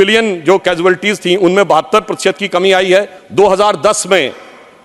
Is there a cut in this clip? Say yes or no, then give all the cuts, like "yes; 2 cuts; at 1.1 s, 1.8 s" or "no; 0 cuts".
yes; 1 cut; at 3.2 s